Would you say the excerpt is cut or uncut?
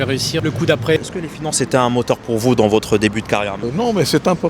cut